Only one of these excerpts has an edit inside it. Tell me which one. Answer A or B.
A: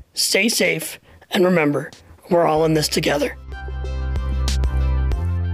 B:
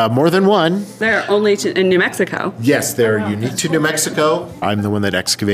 B